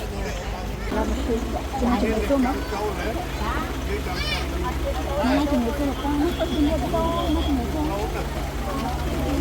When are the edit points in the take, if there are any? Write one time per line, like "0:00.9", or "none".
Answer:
0:00.9

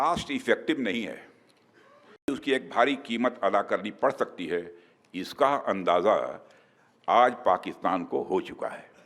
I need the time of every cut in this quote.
0:02.3

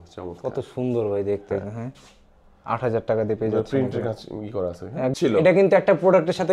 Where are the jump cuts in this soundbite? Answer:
0:05.1

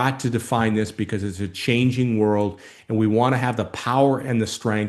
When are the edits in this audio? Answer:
none

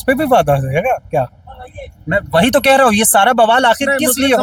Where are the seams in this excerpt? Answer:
none

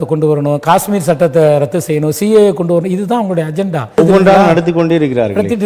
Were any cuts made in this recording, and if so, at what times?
0:04.0

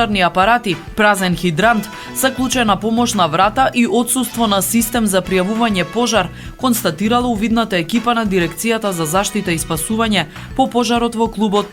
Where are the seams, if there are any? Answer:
none

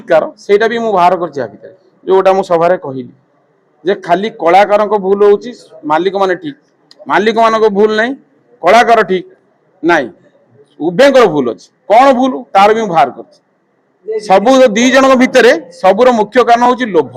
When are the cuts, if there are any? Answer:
none

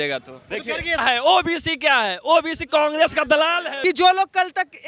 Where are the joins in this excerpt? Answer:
0:00.9
0:03.7

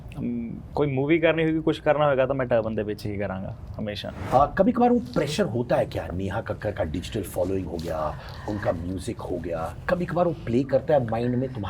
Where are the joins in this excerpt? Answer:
0:04.2

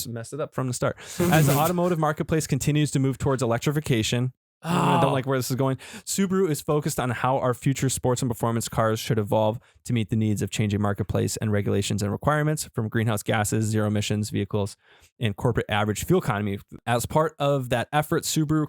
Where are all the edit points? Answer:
0:16.8

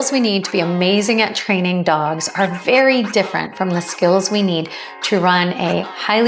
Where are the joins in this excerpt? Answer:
none

